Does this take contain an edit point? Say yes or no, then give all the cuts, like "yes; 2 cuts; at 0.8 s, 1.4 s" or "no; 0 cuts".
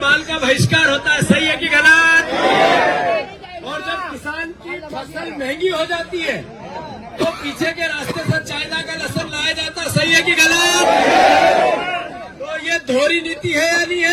no; 0 cuts